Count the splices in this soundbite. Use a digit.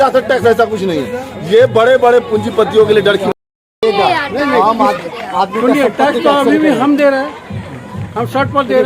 1